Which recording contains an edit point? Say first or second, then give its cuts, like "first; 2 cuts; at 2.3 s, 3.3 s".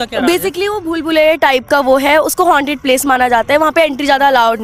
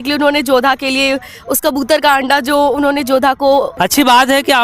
second; 1 cut; at 3.7 s